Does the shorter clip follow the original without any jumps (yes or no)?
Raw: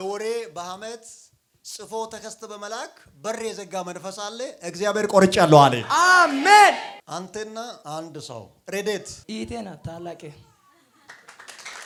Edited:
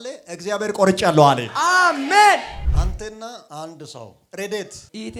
yes